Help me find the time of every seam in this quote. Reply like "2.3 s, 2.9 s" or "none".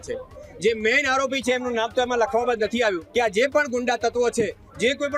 3.0 s